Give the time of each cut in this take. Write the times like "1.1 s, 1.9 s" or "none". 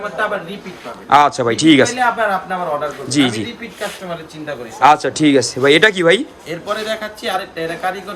none